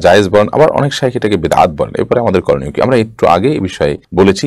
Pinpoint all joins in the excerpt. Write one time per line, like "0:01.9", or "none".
none